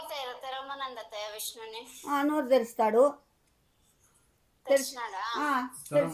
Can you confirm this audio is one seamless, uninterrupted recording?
yes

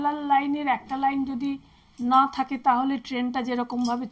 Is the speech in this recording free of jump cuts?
yes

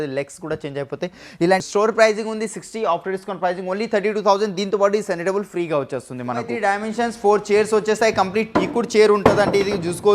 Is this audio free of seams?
no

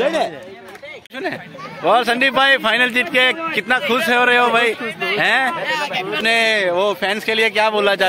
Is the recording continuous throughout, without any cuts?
no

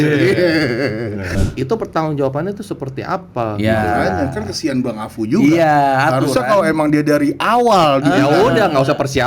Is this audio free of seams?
no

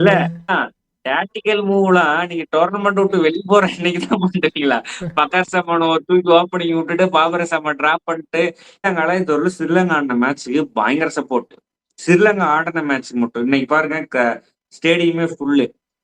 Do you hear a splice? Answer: yes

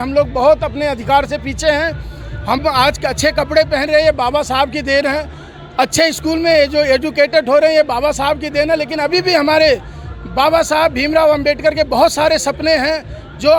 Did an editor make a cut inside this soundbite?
no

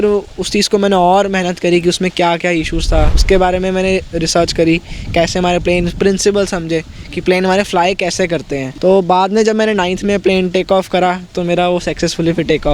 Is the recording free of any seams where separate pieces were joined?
no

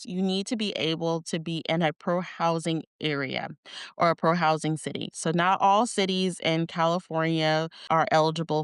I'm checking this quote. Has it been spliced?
no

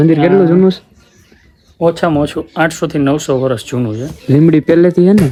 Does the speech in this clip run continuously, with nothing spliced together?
yes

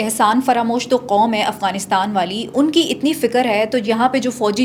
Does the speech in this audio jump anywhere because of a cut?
no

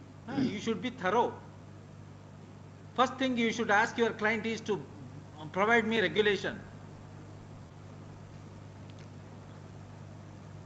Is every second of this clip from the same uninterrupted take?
yes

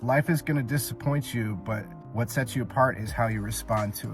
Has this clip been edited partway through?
yes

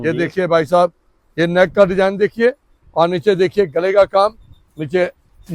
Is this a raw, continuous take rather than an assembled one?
yes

